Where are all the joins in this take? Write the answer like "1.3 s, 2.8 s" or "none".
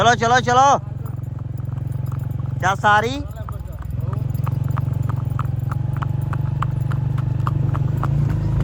none